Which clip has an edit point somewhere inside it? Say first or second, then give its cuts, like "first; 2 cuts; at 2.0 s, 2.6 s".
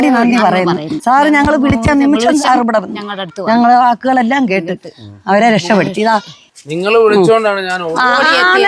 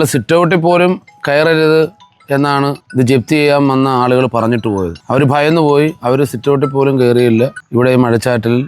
first; 1 cut; at 0.9 s